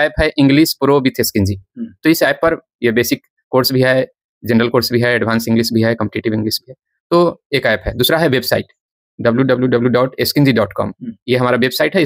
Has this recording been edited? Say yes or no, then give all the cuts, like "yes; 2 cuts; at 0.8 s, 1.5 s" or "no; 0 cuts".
no; 0 cuts